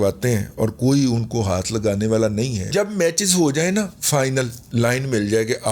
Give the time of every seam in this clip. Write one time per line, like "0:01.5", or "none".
0:02.7
0:04.7